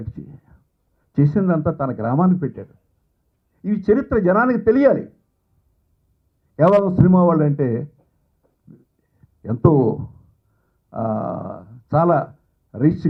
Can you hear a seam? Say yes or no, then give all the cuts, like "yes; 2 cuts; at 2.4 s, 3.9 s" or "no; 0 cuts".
no; 0 cuts